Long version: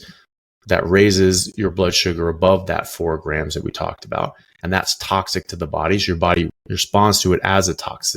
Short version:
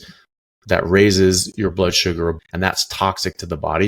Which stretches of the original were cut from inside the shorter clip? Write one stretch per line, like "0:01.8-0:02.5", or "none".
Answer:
0:02.4-0:04.5